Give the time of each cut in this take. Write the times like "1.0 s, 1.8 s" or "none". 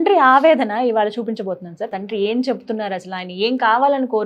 1.9 s